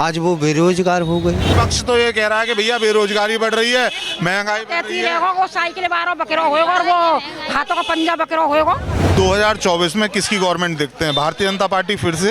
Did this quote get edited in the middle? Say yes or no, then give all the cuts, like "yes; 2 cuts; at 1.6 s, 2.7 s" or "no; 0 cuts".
yes; 2 cuts; at 1.5 s, 9.1 s